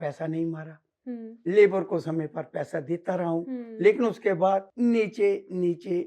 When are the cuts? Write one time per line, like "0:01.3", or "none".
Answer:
0:04.7